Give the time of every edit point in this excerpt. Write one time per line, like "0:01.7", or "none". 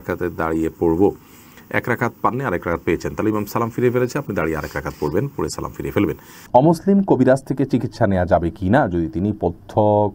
none